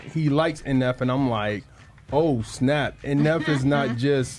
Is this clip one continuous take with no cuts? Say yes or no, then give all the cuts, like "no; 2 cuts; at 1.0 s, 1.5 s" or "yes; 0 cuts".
yes; 0 cuts